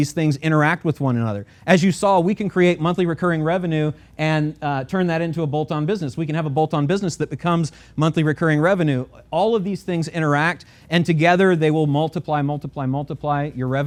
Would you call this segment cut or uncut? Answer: uncut